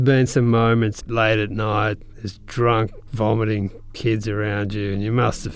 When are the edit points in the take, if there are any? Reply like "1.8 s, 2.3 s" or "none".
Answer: 0.9 s